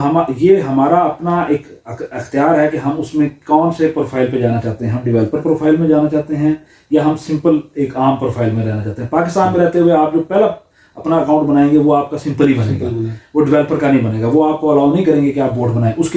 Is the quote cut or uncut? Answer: uncut